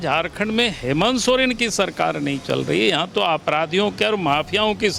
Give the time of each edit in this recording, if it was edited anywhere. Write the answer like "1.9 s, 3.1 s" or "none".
none